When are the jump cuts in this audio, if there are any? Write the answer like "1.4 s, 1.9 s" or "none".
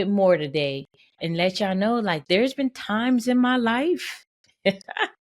1.1 s, 2.2 s